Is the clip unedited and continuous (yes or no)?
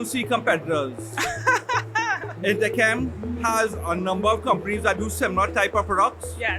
yes